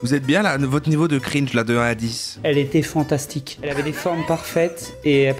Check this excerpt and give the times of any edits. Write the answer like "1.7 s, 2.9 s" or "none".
2.3 s